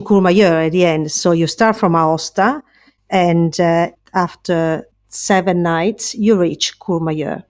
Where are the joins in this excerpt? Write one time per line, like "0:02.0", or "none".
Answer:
none